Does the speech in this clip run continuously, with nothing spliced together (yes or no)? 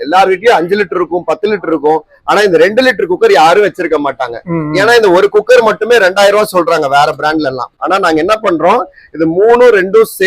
no